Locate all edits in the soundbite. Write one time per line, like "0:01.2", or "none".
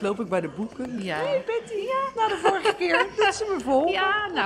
none